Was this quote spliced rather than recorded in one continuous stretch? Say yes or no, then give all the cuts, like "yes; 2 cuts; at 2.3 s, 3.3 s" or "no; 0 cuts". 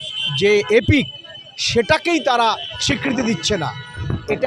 no; 0 cuts